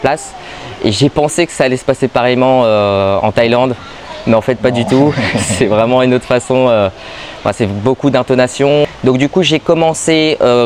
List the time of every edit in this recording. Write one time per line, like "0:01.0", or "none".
none